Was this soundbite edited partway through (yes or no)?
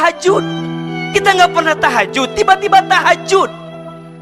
no